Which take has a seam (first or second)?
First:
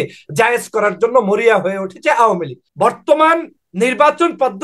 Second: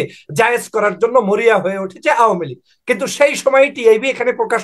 first